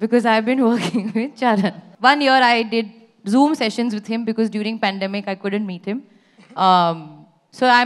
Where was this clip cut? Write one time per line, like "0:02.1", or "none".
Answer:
0:01.8